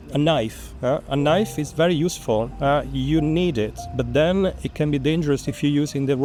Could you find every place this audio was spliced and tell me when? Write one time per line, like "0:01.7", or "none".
none